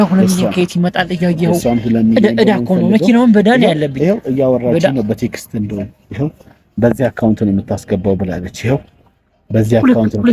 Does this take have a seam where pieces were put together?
no; 0 cuts

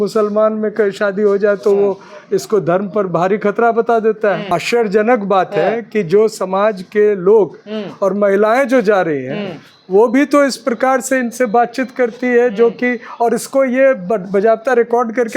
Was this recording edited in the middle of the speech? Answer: yes; 1 cut; at 4.4 s

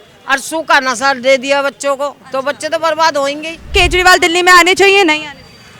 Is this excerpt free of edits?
no; 1 cut; at 3.7 s

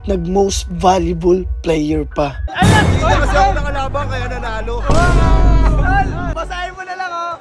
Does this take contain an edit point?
yes; 2 cuts; at 2.4 s, 6.3 s

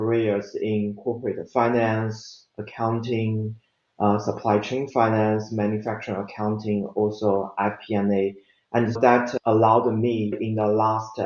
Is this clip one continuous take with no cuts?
no; 1 cut; at 9.0 s

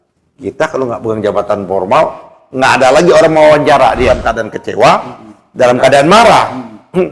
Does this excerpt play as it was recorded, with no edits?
no; 1 cut; at 4.1 s

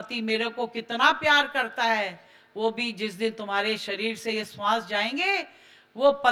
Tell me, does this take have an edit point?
no; 0 cuts

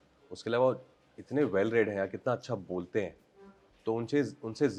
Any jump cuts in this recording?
no; 0 cuts

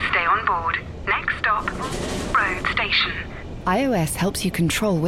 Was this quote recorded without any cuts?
yes; 0 cuts

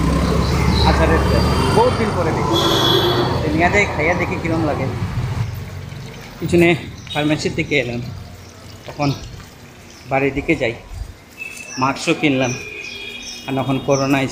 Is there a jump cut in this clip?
no; 0 cuts

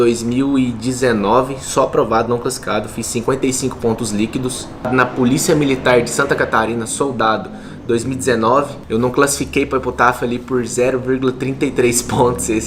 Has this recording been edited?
no; 0 cuts

